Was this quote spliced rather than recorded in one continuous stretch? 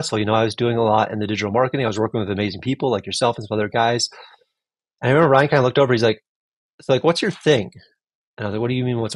no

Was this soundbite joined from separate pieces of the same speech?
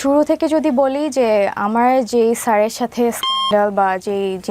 no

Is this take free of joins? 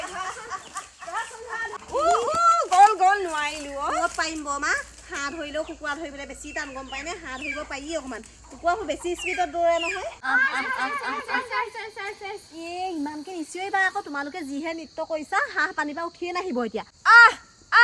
no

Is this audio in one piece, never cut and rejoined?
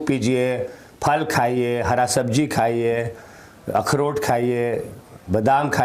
yes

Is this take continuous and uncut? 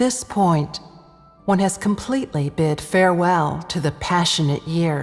yes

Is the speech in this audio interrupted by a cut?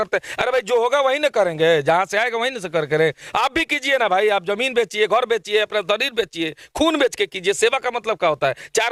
no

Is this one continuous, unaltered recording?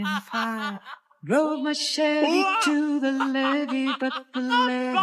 yes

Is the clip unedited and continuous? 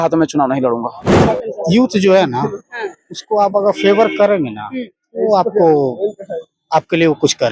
no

